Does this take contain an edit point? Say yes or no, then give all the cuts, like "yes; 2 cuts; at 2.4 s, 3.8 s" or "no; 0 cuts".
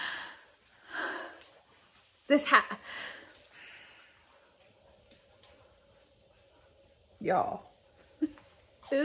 no; 0 cuts